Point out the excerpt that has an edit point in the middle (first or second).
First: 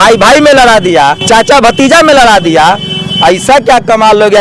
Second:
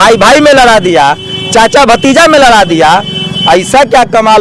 first